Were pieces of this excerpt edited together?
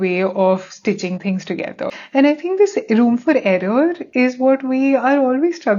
yes; 2 cuts; at 1.9 s, 4.0 s

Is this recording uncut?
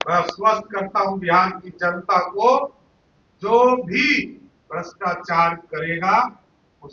yes; 0 cuts

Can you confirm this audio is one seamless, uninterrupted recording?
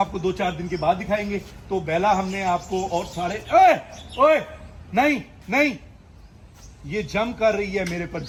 yes; 0 cuts

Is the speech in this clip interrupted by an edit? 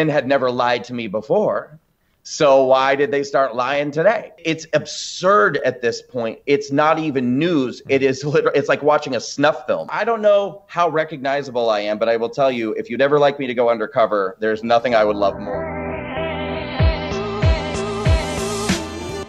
yes; 3 cuts; at 4.4 s, 9.9 s, 15.4 s

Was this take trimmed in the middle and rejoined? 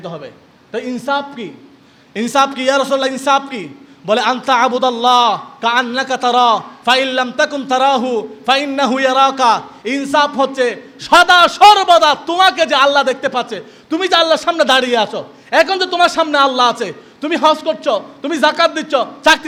no; 0 cuts

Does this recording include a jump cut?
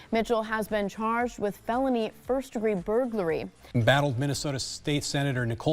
yes; 1 cut; at 3.7 s

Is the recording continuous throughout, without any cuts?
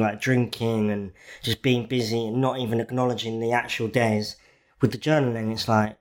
yes; 0 cuts

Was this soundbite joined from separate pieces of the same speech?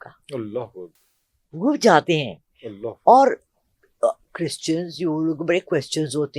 no; 0 cuts

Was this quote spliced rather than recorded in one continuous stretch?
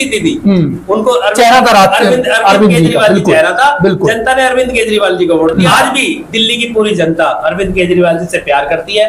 yes; 1 cut; at 5.8 s

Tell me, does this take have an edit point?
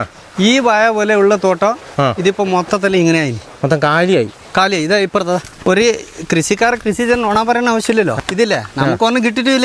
yes; 2 cuts; at 5.5 s, 8.2 s

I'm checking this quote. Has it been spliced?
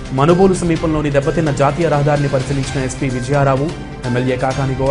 no; 0 cuts

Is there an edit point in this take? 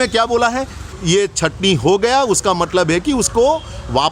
yes; 1 cut; at 1.0 s

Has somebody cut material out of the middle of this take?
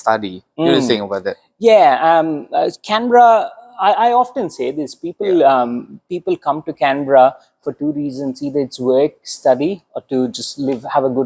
no; 0 cuts

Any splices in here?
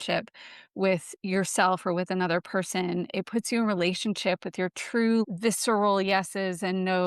yes; 1 cut; at 5.2 s

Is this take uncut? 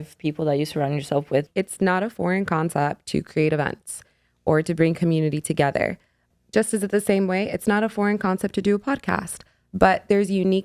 no; 2 cuts; at 1.5 s, 6.3 s

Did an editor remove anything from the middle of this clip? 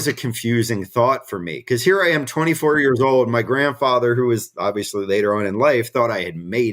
no; 0 cuts

